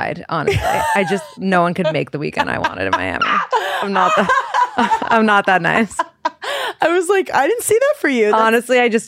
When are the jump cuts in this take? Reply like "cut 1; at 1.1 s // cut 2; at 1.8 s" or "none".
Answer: cut 1; at 1.3 s